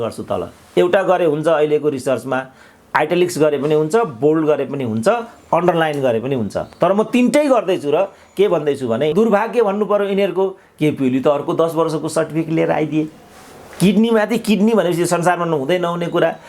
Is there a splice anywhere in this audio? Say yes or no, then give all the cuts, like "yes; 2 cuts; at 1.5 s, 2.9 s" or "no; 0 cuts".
yes; 1 cut; at 9.1 s